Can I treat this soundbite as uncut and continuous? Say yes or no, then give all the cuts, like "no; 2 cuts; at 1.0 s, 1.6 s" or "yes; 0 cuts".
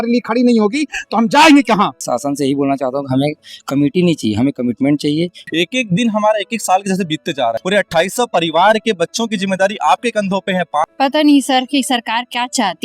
no; 4 cuts; at 2.0 s, 5.4 s, 7.6 s, 10.8 s